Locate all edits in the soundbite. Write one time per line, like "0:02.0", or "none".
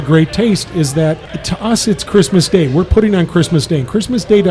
0:01.3